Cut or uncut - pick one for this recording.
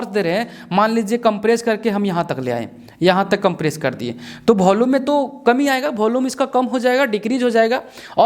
uncut